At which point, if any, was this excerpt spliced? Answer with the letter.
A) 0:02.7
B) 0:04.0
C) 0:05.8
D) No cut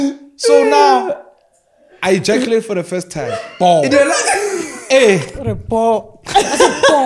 D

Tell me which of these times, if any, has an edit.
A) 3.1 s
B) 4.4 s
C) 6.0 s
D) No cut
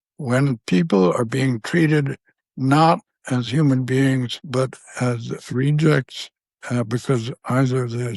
B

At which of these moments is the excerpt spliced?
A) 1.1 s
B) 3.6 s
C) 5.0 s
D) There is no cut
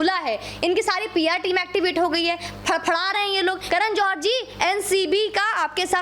B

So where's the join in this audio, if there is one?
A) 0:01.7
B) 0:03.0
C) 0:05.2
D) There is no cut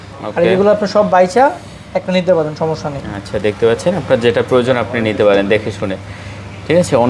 D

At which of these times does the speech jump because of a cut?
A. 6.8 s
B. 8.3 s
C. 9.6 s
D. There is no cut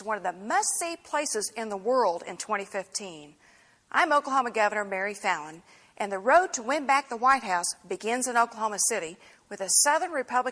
A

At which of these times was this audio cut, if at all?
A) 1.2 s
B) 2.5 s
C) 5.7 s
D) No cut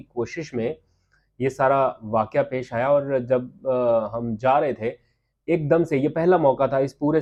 D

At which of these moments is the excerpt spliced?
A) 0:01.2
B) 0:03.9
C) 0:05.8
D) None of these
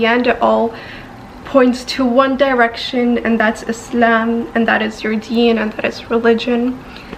D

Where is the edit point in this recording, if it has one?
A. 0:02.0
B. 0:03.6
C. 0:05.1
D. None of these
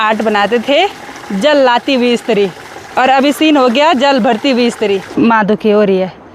C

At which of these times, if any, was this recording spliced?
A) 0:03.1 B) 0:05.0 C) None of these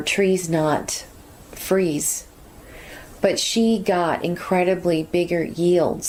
C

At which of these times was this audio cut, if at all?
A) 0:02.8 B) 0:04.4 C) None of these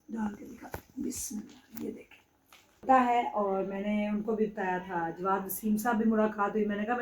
A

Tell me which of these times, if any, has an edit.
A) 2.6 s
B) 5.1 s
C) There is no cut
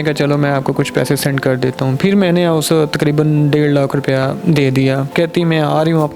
B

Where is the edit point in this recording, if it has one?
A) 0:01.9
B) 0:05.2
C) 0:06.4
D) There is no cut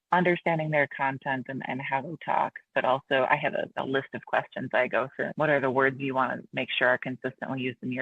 B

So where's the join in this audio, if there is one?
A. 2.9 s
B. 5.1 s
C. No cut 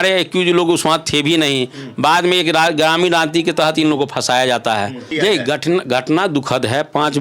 B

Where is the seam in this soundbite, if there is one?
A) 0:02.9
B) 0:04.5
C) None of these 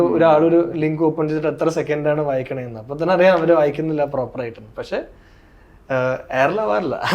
C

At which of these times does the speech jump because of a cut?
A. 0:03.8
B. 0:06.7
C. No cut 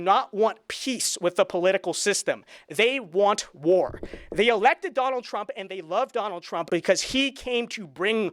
B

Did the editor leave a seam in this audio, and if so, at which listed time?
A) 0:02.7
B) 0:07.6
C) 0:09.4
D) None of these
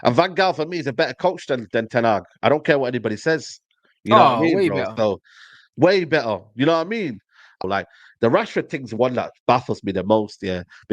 B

